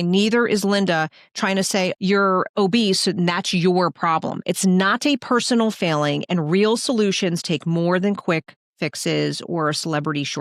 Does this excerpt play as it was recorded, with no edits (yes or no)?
yes